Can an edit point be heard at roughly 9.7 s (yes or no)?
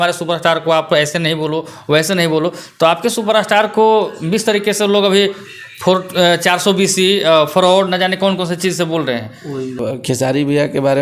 yes